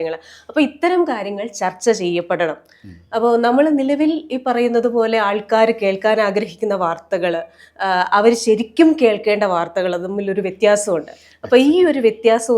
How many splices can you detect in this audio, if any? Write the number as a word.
zero